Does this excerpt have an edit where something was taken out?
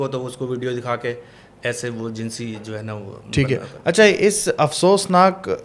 no; 0 cuts

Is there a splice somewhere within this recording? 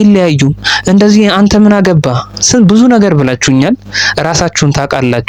no; 0 cuts

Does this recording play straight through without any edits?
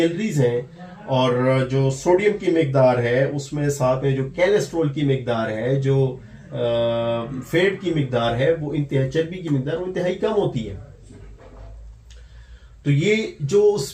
yes; 0 cuts

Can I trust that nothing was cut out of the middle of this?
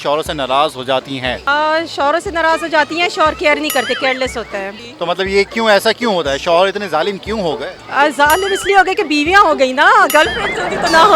no; 2 cuts; at 1.4 s, 4.8 s

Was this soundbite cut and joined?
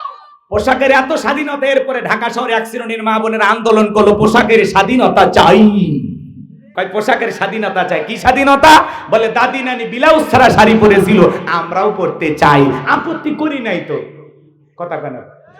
yes; 1 cut; at 6.6 s

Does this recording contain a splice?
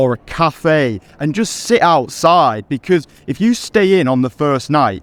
no; 0 cuts

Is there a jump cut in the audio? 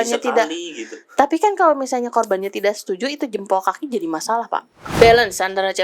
yes; 1 cut; at 4.8 s

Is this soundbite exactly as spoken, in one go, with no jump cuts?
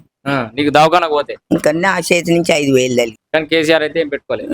no; 2 cuts; at 1.4 s, 3.2 s

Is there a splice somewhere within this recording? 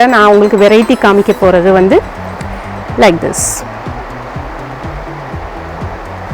no; 0 cuts

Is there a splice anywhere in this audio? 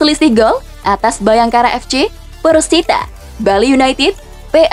no; 0 cuts

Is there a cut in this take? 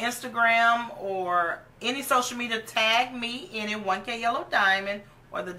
no; 0 cuts

